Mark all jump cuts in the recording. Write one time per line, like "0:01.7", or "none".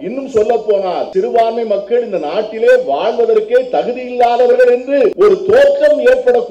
0:01.1
0:05.1